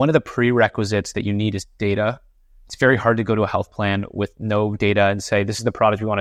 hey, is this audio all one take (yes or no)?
yes